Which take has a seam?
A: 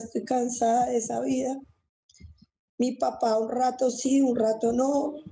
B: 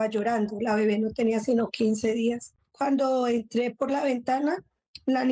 B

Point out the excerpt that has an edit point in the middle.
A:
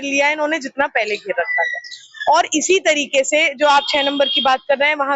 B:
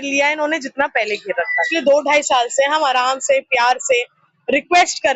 B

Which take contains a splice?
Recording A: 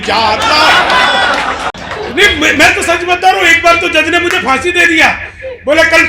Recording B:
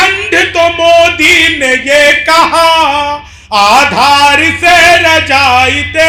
A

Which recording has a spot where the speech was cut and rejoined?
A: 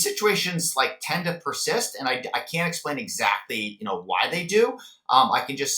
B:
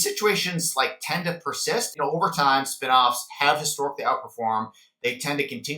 B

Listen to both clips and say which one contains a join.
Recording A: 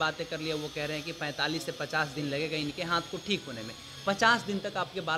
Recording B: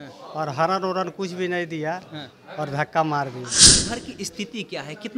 B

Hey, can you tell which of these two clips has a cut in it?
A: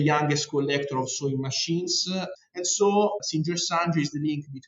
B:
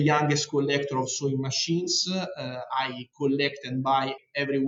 A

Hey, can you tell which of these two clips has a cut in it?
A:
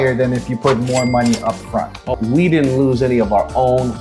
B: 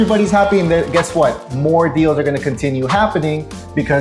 A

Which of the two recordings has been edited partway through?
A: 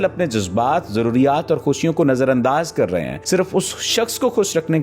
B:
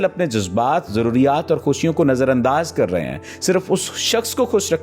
A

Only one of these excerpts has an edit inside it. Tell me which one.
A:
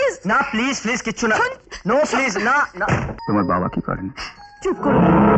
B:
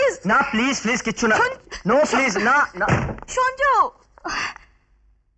A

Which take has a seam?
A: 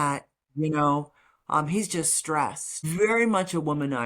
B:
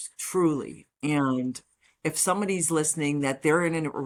A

